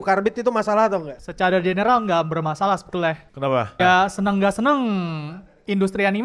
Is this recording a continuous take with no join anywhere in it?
no; 2 cuts; at 1.2 s, 3.8 s

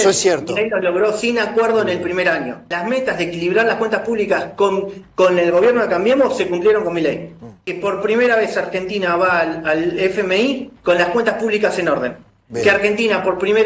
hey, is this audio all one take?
no; 2 cuts; at 2.7 s, 7.7 s

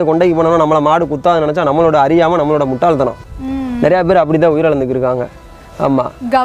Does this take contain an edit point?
no; 0 cuts

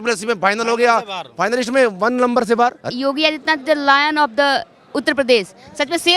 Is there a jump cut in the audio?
yes; 1 cut; at 2.8 s

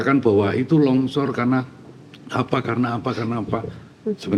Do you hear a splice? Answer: no; 0 cuts

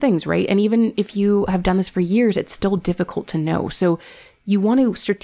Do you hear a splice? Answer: no; 0 cuts

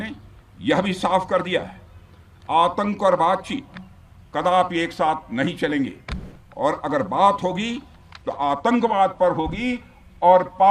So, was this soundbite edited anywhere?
no; 0 cuts

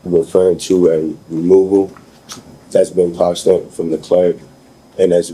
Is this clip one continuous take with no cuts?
yes; 0 cuts

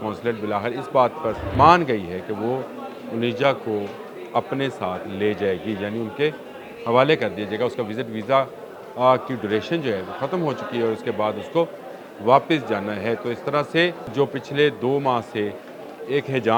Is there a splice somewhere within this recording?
yes; 2 cuts; at 1.4 s, 14.1 s

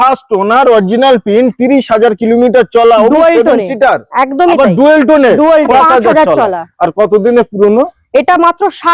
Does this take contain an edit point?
yes; 1 cut; at 5.7 s

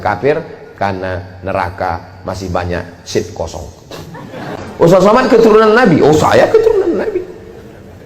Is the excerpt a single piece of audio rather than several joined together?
no; 1 cut; at 4.5 s

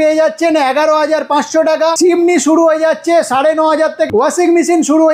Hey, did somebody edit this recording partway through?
yes; 2 cuts; at 2.0 s, 4.1 s

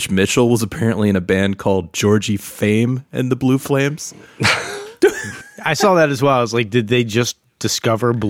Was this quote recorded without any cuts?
yes; 0 cuts

